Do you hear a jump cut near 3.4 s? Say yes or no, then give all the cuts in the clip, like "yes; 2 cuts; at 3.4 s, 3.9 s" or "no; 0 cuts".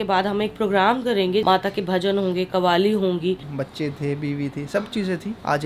yes; 2 cuts; at 1.4 s, 3.4 s